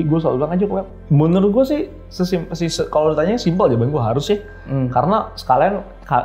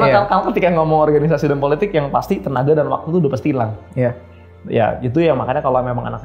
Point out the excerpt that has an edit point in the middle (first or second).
first